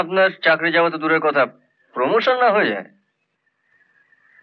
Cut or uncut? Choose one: uncut